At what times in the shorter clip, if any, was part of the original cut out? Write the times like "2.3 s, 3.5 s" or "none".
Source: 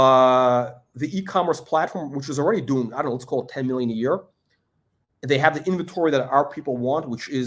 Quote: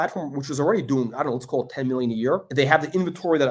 2.5 s